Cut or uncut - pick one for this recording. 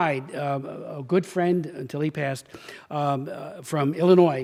uncut